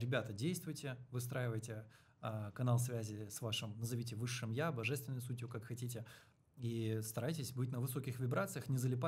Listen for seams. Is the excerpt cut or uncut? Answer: uncut